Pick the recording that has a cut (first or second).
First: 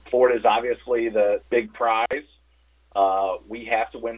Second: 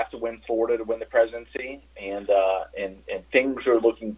first